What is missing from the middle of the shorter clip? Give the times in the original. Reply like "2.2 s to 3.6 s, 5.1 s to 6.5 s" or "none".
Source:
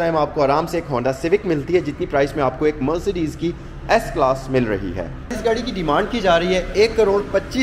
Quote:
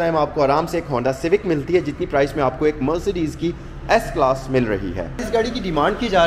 5.1 s to 5.2 s